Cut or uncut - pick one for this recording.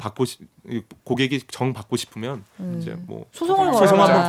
uncut